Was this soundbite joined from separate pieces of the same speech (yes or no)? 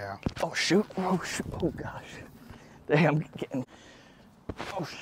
yes